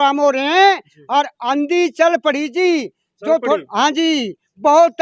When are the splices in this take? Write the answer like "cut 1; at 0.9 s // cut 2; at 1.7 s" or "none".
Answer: none